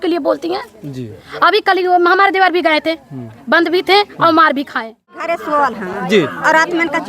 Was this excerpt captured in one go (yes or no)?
no